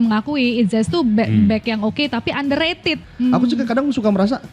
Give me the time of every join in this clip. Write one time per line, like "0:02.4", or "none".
0:03.0